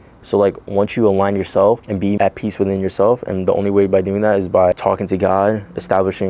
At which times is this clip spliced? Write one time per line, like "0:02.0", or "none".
0:02.0